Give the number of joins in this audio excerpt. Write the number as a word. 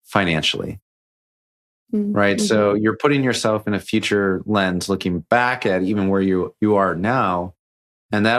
zero